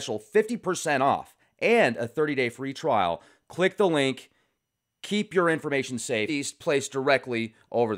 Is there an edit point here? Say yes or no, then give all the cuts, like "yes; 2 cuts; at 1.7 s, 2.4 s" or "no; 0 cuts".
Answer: no; 0 cuts